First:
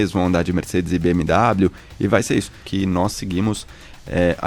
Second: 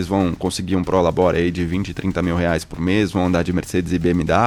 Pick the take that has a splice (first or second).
first